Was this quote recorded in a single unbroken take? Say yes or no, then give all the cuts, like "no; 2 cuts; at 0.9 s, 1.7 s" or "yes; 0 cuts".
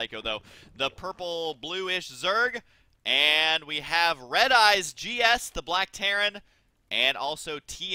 no; 1 cut; at 5.0 s